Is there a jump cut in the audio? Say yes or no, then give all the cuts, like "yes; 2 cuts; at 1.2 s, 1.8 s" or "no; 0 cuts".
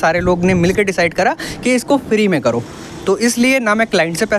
no; 0 cuts